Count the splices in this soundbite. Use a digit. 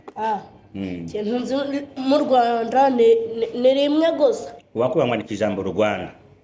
1